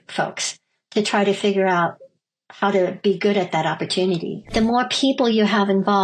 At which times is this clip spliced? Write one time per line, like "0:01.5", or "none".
0:04.5